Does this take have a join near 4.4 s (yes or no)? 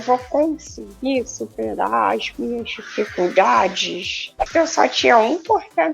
yes